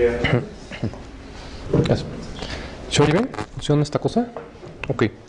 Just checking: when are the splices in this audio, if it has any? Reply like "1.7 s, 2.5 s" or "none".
3.5 s